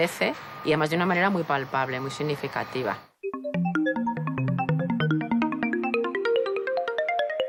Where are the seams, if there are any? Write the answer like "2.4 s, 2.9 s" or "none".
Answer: none